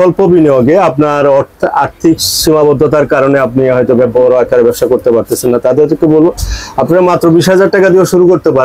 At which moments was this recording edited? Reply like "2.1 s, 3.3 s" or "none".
none